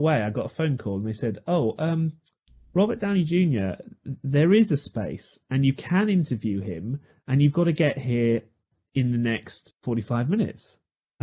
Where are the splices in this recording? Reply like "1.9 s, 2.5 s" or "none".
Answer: none